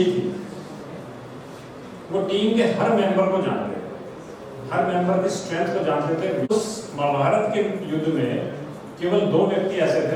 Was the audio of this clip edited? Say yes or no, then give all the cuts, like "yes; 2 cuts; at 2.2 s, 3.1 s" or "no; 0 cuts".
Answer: yes; 1 cut; at 6.5 s